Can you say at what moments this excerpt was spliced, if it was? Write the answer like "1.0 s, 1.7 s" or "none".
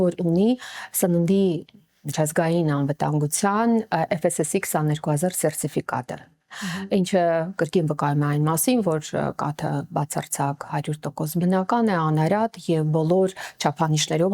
none